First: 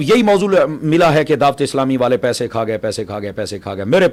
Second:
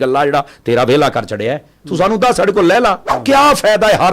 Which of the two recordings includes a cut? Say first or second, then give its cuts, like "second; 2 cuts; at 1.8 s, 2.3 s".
second; 1 cut; at 3.1 s